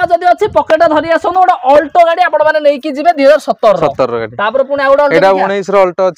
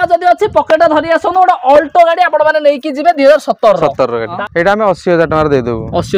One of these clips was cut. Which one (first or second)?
second